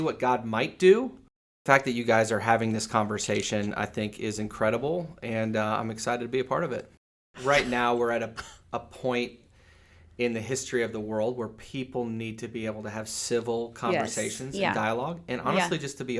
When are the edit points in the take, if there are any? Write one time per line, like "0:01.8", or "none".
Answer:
0:01.6
0:07.2